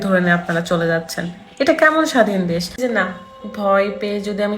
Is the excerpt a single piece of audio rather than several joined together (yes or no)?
no